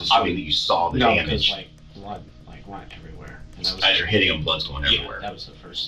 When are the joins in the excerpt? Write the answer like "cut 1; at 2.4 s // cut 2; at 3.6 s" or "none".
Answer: none